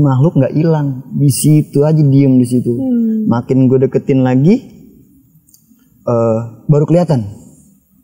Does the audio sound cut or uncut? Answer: uncut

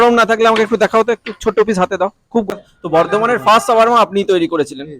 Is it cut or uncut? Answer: cut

